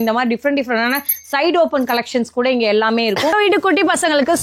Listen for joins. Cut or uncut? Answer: cut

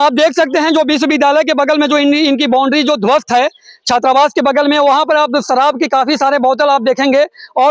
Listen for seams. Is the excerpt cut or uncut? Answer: uncut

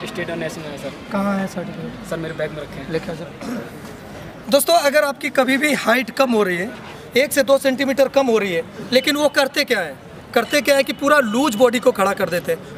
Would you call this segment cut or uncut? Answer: cut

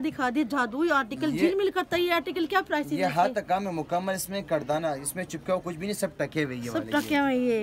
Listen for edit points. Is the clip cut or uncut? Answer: uncut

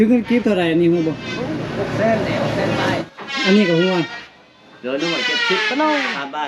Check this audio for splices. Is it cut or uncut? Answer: cut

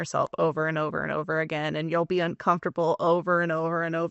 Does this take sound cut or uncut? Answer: uncut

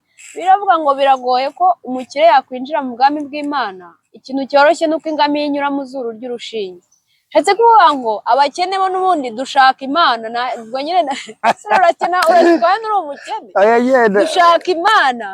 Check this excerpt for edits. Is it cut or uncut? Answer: uncut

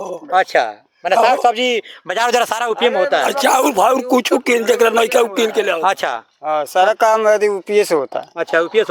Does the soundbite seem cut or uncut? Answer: uncut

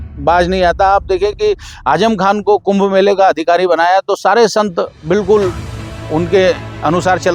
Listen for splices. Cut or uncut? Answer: uncut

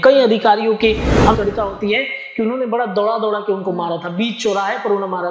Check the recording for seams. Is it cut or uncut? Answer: cut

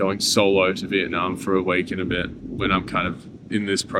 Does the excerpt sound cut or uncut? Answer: uncut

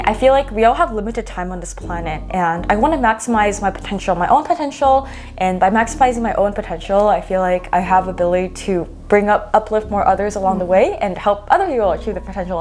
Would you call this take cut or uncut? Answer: uncut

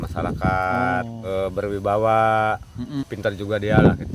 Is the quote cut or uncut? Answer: cut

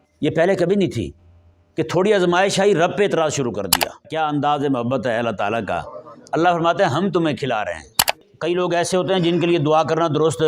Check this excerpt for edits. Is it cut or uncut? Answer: cut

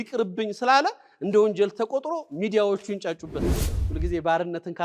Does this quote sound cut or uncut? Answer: cut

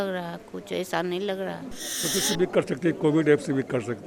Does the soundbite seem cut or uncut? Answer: cut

